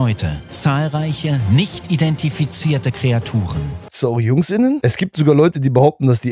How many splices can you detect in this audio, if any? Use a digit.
2